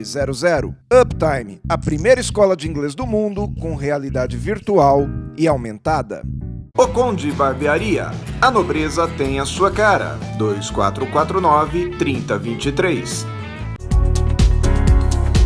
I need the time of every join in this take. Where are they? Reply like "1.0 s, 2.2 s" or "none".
13.7 s